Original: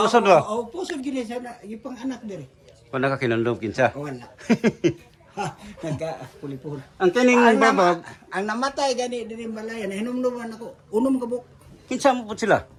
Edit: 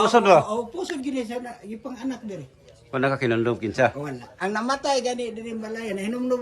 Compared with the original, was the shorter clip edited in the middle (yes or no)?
yes